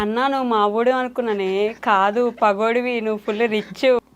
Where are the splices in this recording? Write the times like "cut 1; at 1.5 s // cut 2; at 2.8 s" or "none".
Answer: none